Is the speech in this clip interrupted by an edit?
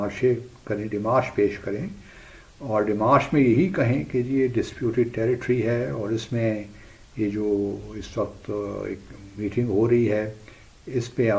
no; 0 cuts

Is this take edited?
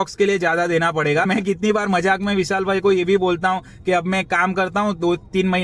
yes; 1 cut; at 1.3 s

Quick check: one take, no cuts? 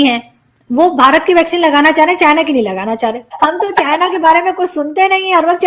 no; 1 cut; at 3.3 s

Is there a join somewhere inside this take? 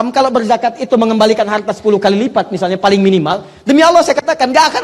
no; 0 cuts

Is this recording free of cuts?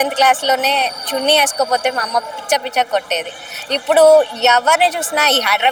yes; 0 cuts

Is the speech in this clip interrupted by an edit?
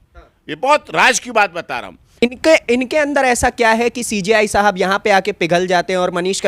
yes; 1 cut; at 2.2 s

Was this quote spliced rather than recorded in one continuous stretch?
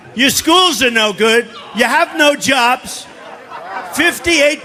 no; 0 cuts

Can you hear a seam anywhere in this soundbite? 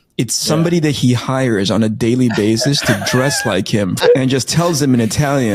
yes; 1 cut; at 3.9 s

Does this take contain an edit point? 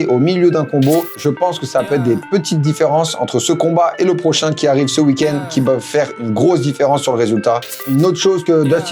yes; 2 cuts; at 1.1 s, 7.8 s

